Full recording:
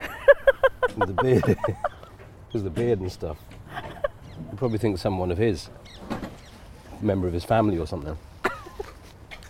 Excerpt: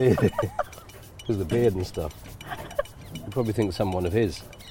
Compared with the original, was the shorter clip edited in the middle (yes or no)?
no